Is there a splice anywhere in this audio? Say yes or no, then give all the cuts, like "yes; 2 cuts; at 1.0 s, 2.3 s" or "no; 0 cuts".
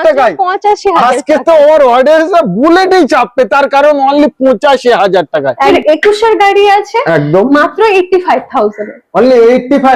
yes; 1 cut; at 5.7 s